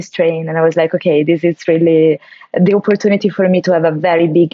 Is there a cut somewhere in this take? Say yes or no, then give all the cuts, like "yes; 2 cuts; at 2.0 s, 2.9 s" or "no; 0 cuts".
no; 0 cuts